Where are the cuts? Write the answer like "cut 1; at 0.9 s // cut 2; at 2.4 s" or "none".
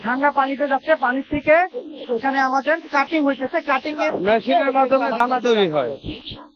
none

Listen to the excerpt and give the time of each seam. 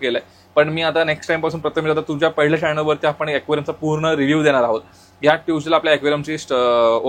none

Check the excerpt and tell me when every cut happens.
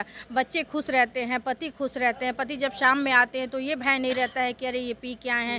none

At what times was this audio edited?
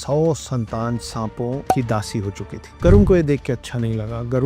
cut 1; at 1.7 s

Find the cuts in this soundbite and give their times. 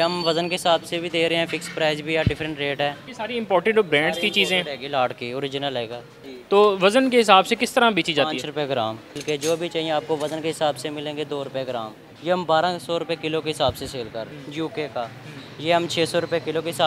cut 1; at 3.1 s // cut 2; at 9.2 s // cut 3; at 12.1 s // cut 4; at 14.3 s

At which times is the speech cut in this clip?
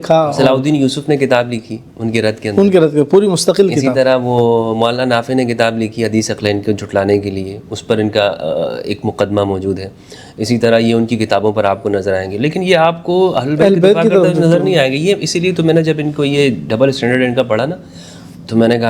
none

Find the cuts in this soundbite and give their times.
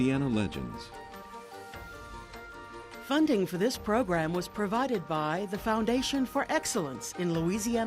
cut 1; at 3.0 s

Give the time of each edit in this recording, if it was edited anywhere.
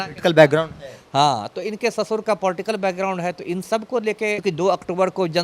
cut 1; at 4.4 s

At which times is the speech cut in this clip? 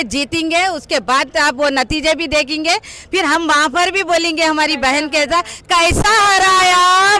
none

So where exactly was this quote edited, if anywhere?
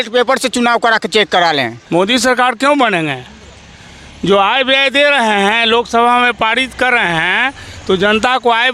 cut 1; at 1.8 s

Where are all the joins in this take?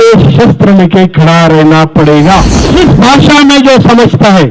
cut 1; at 2.6 s

